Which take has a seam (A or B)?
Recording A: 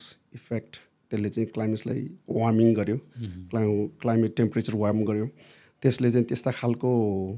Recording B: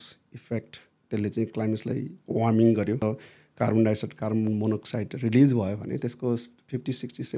B